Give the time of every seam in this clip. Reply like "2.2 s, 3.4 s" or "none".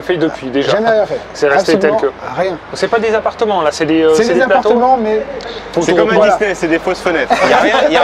none